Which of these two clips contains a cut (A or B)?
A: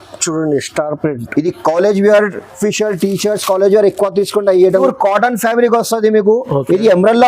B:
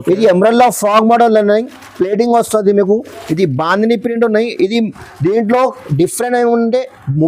A